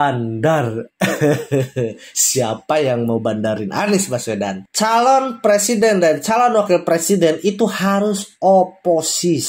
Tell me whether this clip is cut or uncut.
cut